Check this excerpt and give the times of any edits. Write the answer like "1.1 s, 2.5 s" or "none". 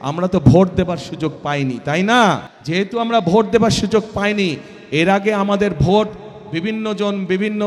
2.5 s